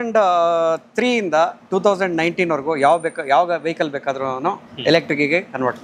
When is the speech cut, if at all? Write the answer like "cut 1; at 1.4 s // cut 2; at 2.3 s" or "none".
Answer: none